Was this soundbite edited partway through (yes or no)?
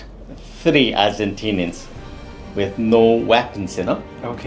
no